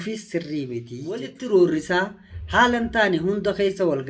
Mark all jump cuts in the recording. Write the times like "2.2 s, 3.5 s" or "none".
1.3 s